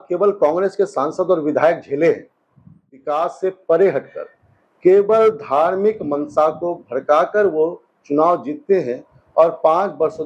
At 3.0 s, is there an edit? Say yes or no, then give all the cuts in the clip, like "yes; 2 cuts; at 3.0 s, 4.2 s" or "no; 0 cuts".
yes; 1 cut; at 3.0 s